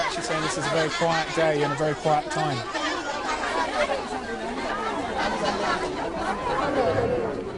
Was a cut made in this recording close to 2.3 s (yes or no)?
yes